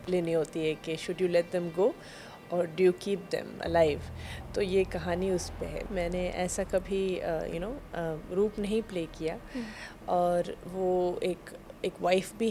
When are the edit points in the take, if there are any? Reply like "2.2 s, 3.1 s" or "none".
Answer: 5.9 s